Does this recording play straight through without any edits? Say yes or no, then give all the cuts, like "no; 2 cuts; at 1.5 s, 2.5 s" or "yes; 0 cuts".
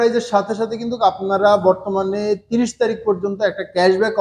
yes; 0 cuts